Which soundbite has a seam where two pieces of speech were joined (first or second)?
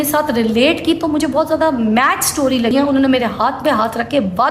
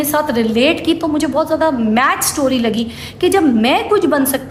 first